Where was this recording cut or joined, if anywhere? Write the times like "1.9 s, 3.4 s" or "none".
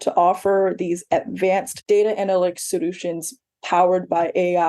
1.7 s